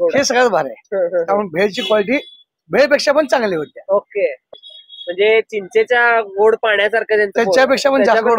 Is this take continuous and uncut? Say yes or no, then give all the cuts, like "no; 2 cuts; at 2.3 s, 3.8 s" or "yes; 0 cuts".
no; 1 cut; at 4.5 s